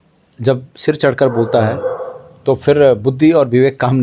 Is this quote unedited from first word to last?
yes; 0 cuts

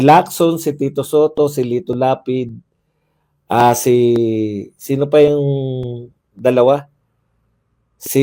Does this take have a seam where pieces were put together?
no; 0 cuts

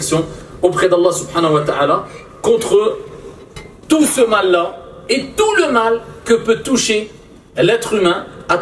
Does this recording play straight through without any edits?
yes; 0 cuts

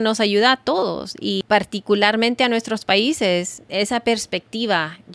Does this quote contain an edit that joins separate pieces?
yes; 2 cuts; at 1.4 s, 3.7 s

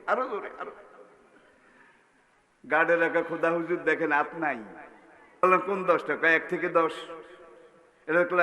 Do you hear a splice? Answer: yes; 1 cut; at 5.4 s

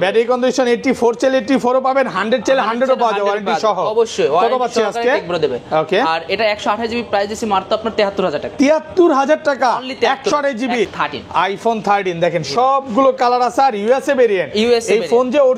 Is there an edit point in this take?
yes; 1 cut; at 10.9 s

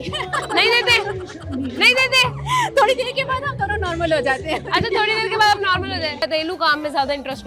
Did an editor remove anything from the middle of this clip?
yes; 1 cut; at 6.2 s

